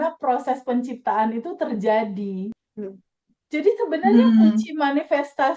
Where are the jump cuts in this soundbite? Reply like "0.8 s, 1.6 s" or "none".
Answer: 2.6 s

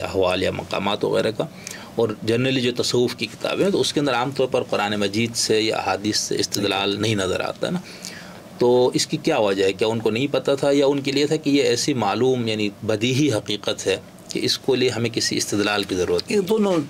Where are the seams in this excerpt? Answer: none

